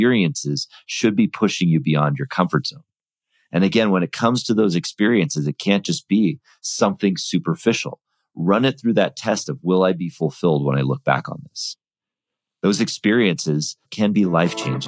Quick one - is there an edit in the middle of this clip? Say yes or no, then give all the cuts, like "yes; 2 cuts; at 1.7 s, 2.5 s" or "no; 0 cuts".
yes; 1 cut; at 13.9 s